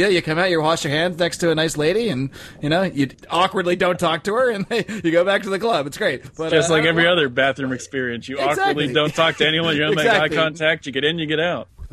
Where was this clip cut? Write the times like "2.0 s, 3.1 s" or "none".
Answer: 3.1 s, 6.3 s